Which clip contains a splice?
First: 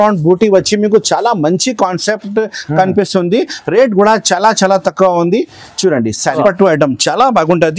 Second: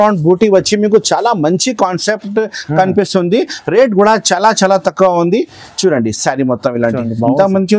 first; 1 cut; at 6.4 s

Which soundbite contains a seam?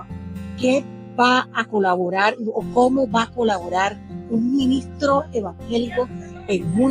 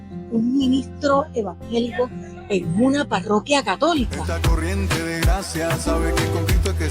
second; 1 cut; at 4.2 s

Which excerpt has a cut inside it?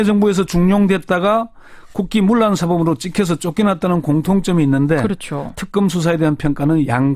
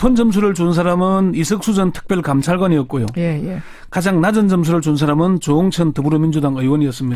first; 1 cut; at 3.5 s

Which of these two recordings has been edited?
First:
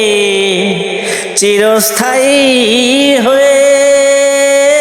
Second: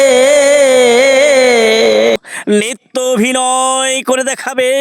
second; 1 cut; at 2.2 s

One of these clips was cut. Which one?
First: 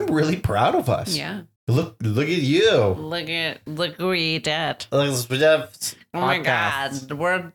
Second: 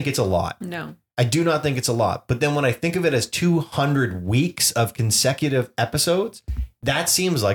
first; 1 cut; at 1.5 s

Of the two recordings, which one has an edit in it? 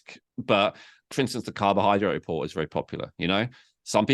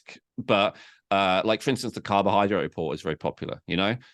first; 1 cut; at 1.1 s

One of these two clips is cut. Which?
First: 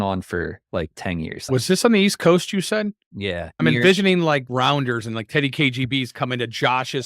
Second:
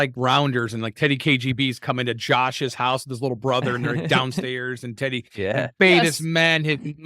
first; 2 cuts; at 1.4 s, 3.4 s

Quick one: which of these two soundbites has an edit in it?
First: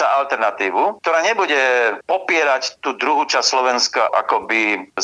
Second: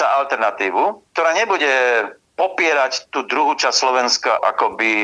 first; 2 cuts; at 1.0 s, 2.0 s

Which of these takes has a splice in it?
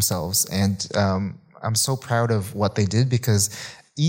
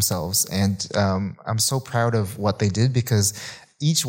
second; 1 cut; at 1.4 s

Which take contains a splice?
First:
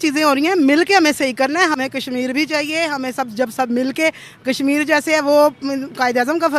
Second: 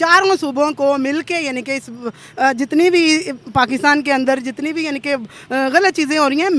first; 1 cut; at 1.8 s

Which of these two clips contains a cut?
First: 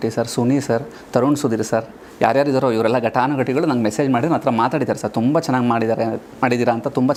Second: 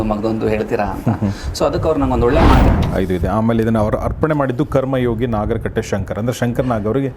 second; 1 cut; at 2.6 s

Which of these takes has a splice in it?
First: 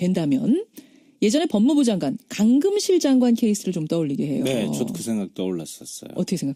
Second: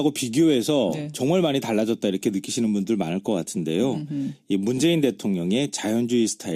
second; 1 cut; at 2.2 s

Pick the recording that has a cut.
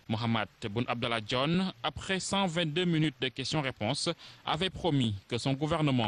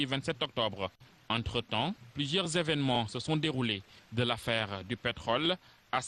second; 1 cut; at 3.5 s

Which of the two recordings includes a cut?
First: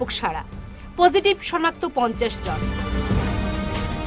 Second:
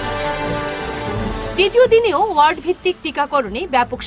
second; 1 cut; at 1.0 s

